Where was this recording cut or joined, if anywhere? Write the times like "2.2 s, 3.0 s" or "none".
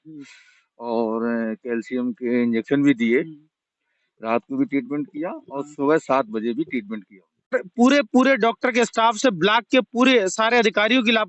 7.5 s